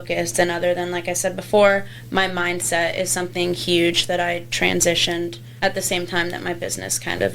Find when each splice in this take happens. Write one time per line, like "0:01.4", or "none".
0:05.4